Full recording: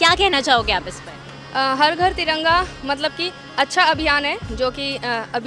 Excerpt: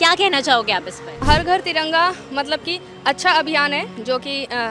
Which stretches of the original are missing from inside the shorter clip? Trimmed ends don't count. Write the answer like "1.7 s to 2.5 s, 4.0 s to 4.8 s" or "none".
1.2 s to 1.7 s